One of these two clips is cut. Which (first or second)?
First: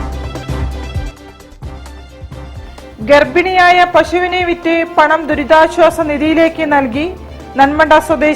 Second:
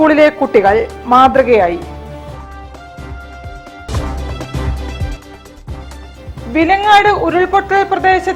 first